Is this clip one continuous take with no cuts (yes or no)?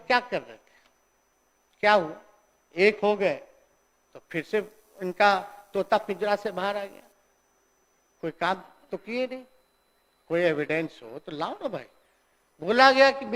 yes